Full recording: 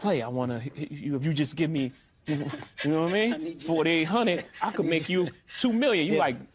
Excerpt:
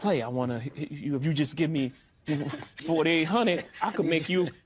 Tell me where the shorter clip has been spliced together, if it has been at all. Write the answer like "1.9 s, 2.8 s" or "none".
2.7 s